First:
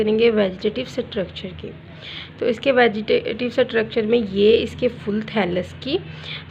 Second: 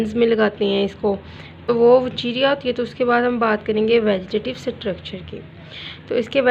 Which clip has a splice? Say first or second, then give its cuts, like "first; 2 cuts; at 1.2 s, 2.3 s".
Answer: second; 1 cut; at 1.7 s